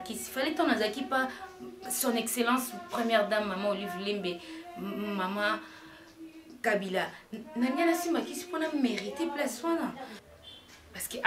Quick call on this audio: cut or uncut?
cut